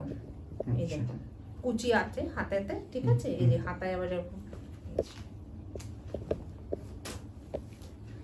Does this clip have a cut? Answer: no; 0 cuts

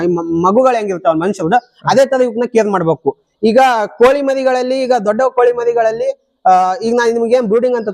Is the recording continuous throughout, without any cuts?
yes; 0 cuts

